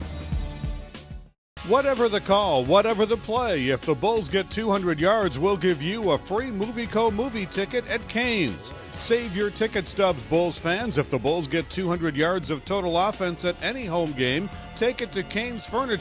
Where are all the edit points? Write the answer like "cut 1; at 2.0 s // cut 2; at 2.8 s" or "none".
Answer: cut 1; at 1.0 s

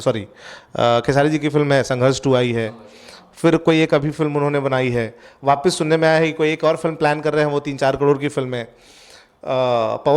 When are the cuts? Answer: none

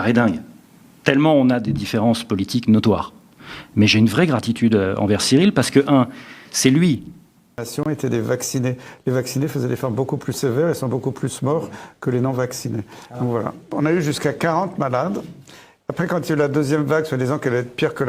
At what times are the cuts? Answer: cut 1; at 7.7 s

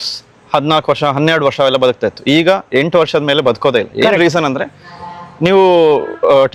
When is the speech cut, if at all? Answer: none

